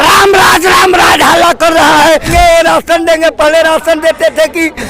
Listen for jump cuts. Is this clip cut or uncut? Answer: cut